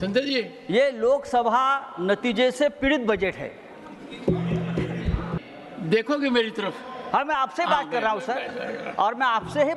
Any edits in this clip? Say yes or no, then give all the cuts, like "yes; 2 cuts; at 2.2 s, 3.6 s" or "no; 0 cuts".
yes; 1 cut; at 5.4 s